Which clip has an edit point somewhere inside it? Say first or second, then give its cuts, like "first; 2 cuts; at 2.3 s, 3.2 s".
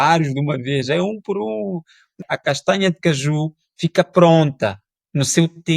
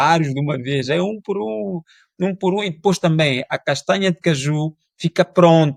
first; 1 cut; at 2.2 s